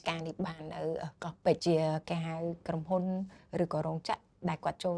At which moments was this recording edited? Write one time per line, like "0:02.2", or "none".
0:01.6